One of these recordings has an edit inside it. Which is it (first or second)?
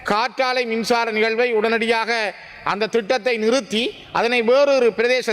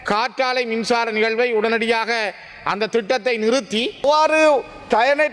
second